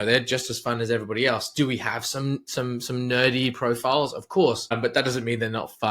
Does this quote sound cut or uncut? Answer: cut